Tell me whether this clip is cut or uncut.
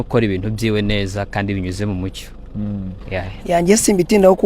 cut